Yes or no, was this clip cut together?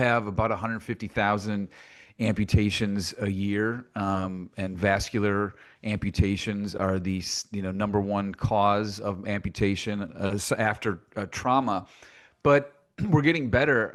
no